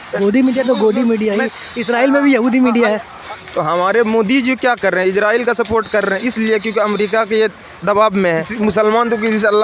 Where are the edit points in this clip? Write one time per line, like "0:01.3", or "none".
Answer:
0:03.2
0:08.5